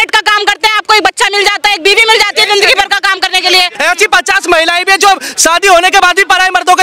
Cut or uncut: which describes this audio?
cut